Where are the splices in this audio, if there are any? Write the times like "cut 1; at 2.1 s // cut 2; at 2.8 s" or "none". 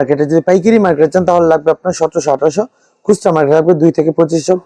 none